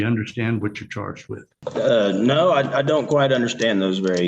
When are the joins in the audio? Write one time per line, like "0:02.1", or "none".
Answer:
0:01.5